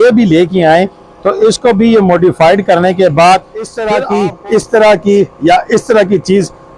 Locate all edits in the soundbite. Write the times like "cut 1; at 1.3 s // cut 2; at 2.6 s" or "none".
cut 1; at 3.8 s

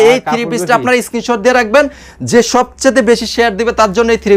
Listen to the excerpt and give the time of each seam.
none

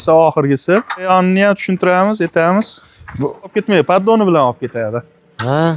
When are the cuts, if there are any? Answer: cut 1; at 1.1 s // cut 2; at 3.5 s

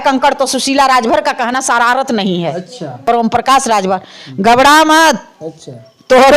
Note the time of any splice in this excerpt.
cut 1; at 3.1 s

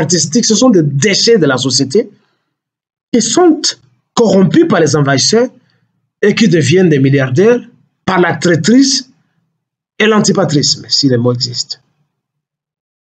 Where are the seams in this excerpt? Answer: none

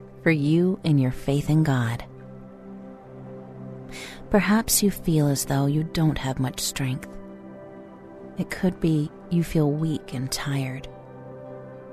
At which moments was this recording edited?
cut 1; at 10.8 s

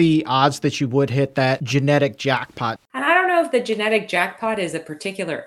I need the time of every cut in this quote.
cut 1; at 1.6 s // cut 2; at 2.8 s

